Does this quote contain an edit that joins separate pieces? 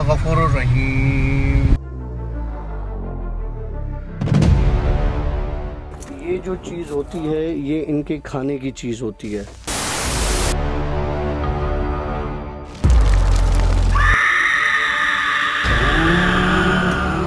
no; 0 cuts

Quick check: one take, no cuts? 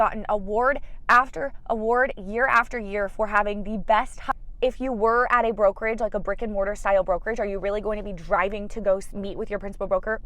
no; 1 cut; at 4.2 s

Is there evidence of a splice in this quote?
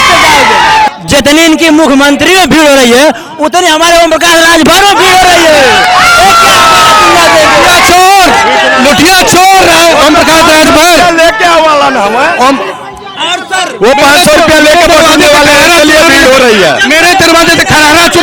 no; 0 cuts

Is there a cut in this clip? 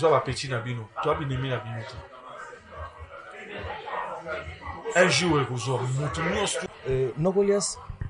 yes; 1 cut; at 6.7 s

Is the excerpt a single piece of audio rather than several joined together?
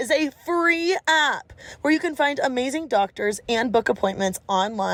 yes; 0 cuts

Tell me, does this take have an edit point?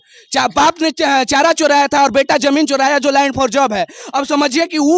no; 0 cuts

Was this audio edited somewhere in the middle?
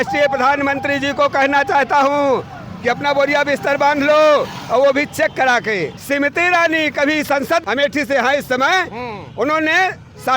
yes; 2 cuts; at 5.9 s, 7.6 s

